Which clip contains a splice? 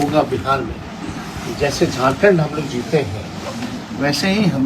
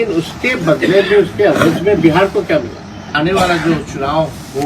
second; 1 cut; at 3.1 s

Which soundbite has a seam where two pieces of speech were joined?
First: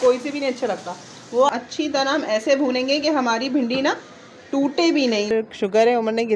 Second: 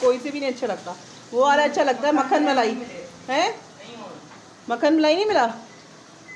first; 2 cuts; at 1.5 s, 5.3 s

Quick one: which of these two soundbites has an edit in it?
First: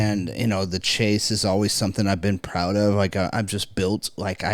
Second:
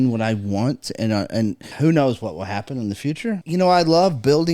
second; 2 cuts; at 1.7 s, 3.4 s

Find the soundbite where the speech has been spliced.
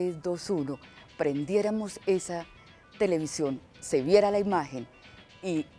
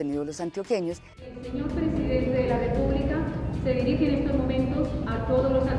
second; 1 cut; at 1.2 s

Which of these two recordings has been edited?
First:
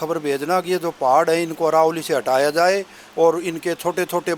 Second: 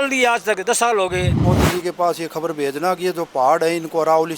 second; 1 cut; at 1.4 s

